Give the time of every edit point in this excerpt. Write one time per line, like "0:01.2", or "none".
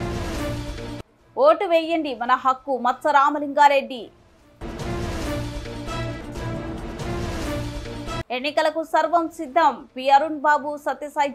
0:00.9